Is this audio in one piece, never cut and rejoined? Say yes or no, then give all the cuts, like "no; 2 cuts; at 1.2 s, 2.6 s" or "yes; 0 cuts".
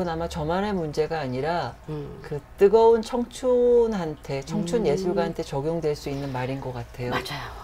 yes; 0 cuts